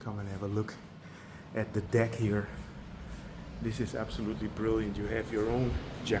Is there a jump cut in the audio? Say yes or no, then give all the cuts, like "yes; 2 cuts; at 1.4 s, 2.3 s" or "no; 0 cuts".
no; 0 cuts